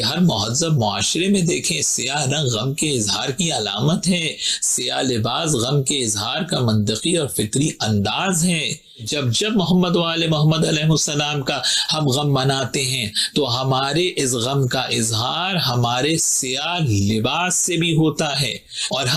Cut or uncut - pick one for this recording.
uncut